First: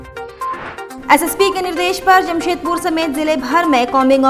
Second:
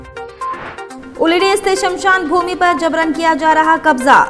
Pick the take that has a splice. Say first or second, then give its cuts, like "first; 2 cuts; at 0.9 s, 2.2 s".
second; 1 cut; at 0.9 s